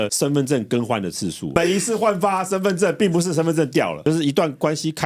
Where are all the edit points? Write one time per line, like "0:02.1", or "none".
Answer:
0:01.5
0:04.0

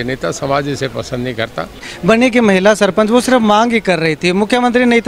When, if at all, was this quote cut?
0:01.9

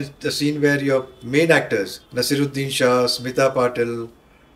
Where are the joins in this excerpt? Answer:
0:02.0

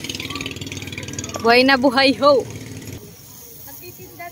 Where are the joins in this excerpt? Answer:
0:03.0

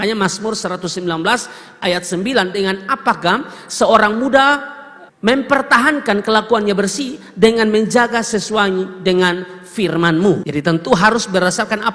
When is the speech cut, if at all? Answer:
0:10.4

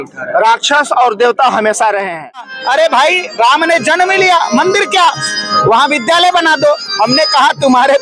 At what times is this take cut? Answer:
0:02.6

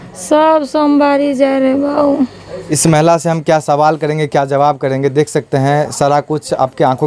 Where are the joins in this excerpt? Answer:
0:02.7

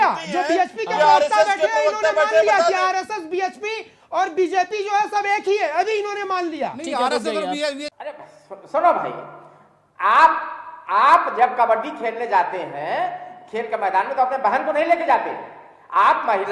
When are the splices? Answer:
0:07.9

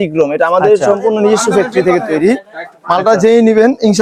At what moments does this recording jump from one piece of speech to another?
none

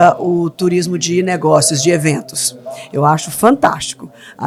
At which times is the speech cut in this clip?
none

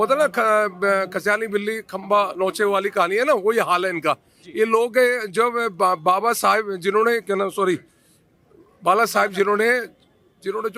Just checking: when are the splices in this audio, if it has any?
none

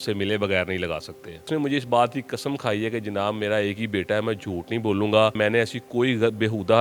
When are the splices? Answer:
0:01.5
0:05.3

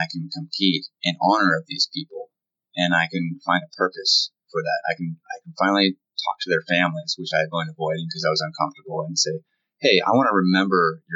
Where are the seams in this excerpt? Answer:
0:00.9

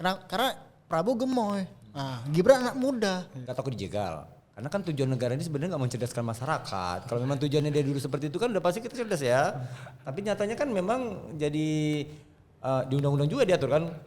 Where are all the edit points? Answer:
0:03.3

